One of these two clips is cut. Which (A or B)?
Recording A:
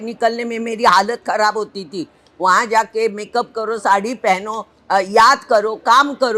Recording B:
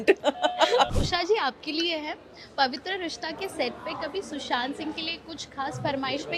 B